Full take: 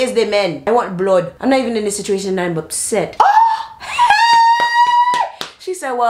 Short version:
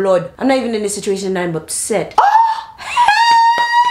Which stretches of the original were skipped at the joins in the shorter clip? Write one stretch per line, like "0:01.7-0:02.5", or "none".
none